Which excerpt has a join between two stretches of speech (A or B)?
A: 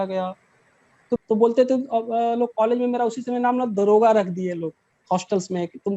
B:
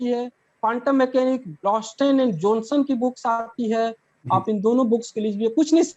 A